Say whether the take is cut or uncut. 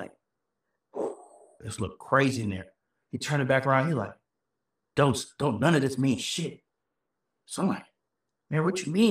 uncut